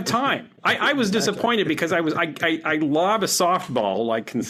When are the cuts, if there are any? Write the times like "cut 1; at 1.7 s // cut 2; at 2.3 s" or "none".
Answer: none